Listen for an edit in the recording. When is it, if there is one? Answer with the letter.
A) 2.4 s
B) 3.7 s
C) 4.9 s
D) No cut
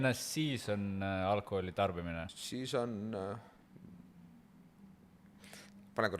A